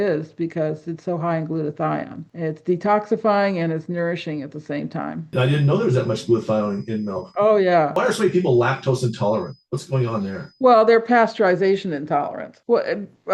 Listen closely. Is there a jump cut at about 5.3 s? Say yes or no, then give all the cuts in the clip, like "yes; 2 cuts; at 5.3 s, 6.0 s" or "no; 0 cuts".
yes; 1 cut; at 5.3 s